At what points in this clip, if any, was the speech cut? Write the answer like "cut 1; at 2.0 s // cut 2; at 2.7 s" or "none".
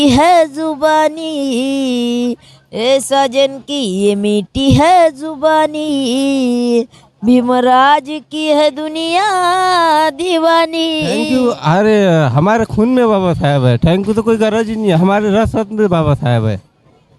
cut 1; at 11.2 s